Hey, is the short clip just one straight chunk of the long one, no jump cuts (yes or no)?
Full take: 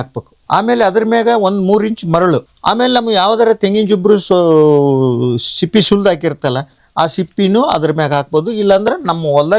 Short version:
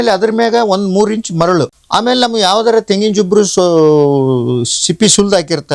yes